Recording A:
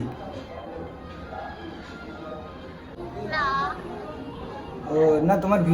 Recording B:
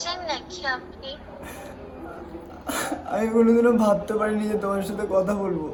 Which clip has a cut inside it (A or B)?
A